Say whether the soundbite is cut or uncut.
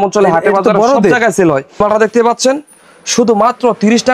cut